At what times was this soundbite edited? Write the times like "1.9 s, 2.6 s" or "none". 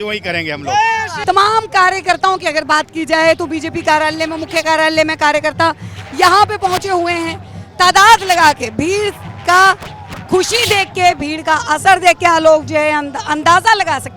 none